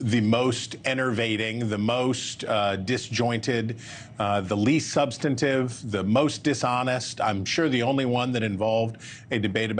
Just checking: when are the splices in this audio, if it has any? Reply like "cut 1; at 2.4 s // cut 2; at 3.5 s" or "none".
none